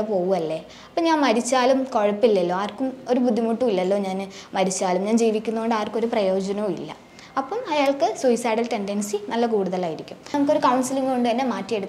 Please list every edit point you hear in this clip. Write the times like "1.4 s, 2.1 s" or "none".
10.3 s

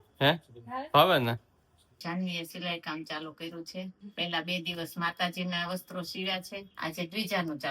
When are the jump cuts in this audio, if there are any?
1.8 s, 4.0 s, 6.6 s

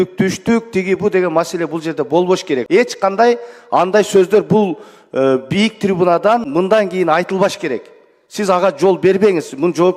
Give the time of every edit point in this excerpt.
2.6 s, 6.5 s

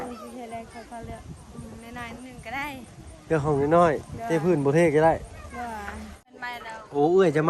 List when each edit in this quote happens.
6.3 s

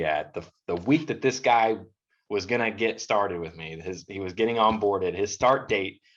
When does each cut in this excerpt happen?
none

